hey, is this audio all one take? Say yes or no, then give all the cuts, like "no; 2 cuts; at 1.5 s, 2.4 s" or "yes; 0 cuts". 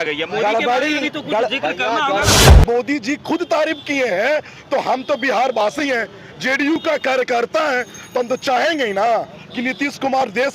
no; 1 cut; at 2.4 s